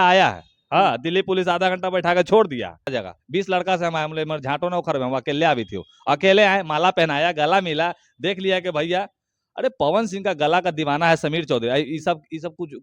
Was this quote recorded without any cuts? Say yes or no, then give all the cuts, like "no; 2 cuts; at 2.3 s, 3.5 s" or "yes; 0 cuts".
no; 1 cut; at 2.9 s